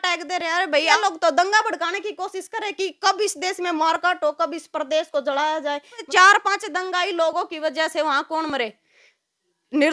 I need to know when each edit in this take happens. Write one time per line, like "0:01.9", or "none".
0:00.9
0:06.1